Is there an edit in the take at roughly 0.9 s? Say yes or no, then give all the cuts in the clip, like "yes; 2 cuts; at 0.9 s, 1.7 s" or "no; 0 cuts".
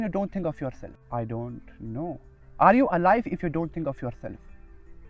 yes; 1 cut; at 0.9 s